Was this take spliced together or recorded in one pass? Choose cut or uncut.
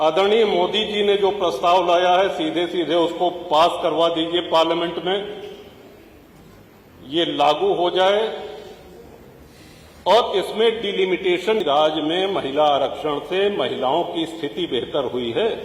cut